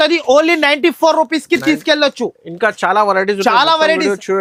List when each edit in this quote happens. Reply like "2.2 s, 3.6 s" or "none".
none